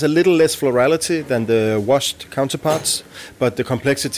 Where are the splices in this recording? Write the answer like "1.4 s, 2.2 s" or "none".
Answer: none